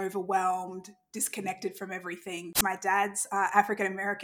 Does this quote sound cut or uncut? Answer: cut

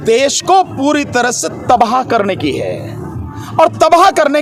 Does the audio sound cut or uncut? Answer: uncut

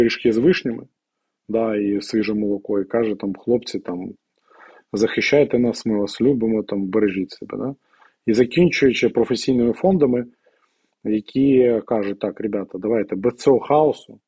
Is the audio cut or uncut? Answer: uncut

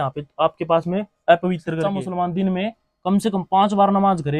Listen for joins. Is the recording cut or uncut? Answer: cut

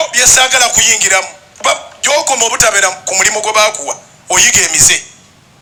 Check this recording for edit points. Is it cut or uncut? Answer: uncut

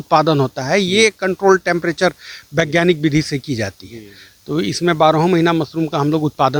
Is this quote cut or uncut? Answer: uncut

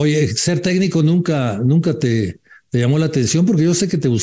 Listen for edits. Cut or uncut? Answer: uncut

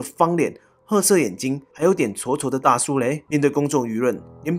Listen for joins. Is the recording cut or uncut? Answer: cut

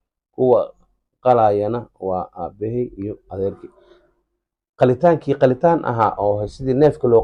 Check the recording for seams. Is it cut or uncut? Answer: uncut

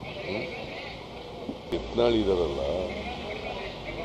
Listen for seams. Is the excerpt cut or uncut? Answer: cut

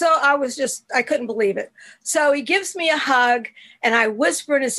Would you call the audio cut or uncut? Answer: uncut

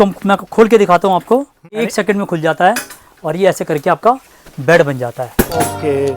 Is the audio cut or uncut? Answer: cut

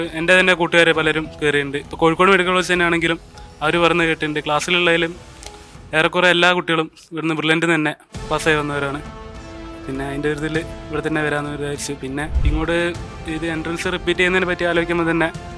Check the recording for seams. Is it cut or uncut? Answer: cut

